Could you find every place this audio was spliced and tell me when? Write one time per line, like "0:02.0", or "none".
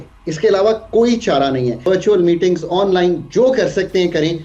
0:01.8